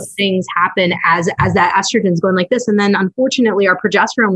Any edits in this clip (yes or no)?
no